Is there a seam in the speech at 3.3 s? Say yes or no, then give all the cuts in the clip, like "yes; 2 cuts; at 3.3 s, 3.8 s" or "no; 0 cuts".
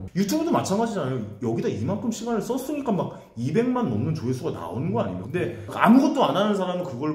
no; 1 cut; at 5.2 s